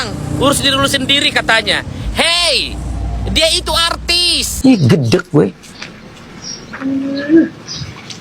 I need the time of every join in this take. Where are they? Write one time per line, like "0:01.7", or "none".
0:04.4